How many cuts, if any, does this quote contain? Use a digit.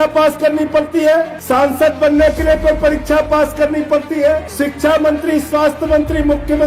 2